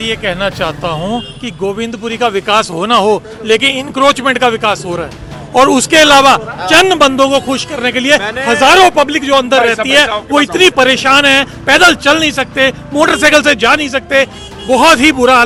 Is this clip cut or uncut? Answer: uncut